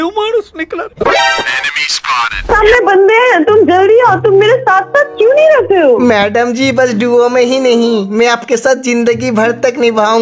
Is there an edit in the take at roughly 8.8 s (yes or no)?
no